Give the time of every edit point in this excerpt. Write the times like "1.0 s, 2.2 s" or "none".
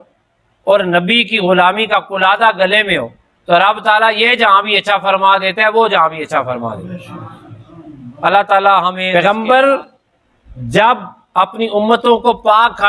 9.0 s